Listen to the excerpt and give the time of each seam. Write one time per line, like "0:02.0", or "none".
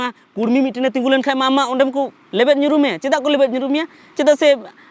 none